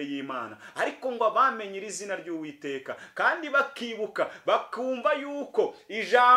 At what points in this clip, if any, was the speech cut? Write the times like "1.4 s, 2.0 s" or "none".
none